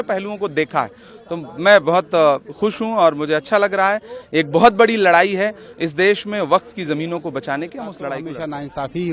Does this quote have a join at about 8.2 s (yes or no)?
yes